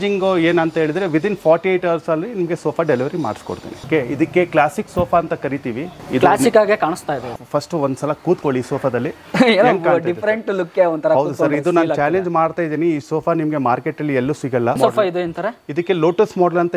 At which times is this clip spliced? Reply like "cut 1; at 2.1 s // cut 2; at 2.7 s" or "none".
cut 1; at 3.8 s // cut 2; at 5.9 s // cut 3; at 7.3 s // cut 4; at 14.8 s